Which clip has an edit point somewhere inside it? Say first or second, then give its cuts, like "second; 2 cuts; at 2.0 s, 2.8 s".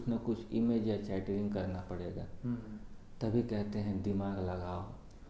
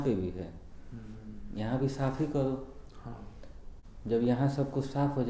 second; 1 cut; at 3.7 s